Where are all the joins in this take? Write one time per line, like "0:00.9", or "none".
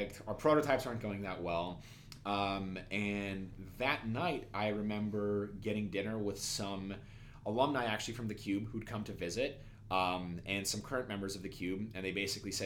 none